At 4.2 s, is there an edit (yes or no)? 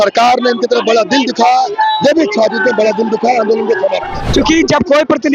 yes